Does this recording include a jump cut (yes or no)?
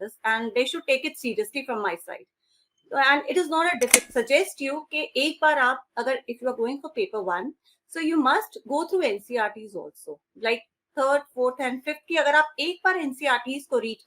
yes